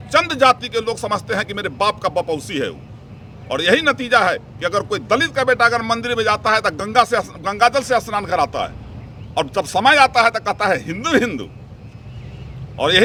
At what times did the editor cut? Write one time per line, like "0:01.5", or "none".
none